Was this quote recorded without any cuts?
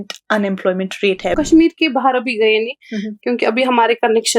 no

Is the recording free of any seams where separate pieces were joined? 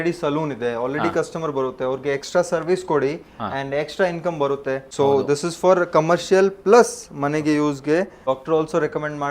no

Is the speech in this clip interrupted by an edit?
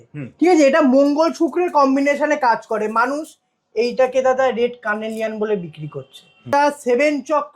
yes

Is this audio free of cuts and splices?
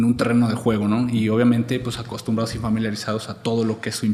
yes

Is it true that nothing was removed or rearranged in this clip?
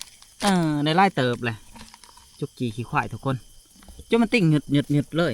yes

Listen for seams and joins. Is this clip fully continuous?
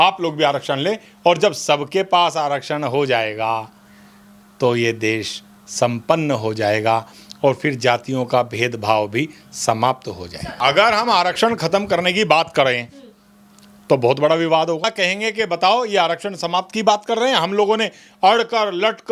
no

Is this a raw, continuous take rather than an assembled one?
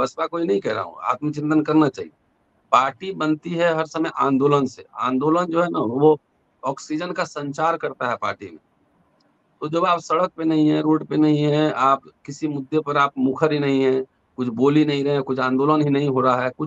yes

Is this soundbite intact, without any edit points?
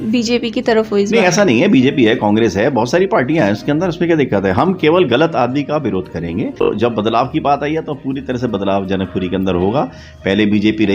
no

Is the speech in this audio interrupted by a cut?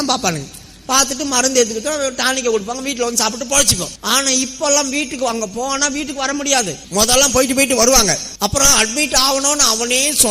yes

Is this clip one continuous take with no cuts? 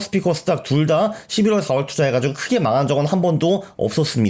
yes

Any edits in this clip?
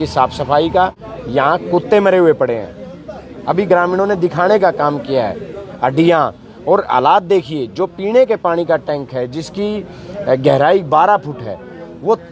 yes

